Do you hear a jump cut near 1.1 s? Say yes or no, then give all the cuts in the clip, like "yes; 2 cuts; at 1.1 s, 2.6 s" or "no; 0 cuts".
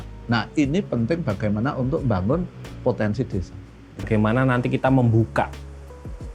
no; 1 cut; at 4.0 s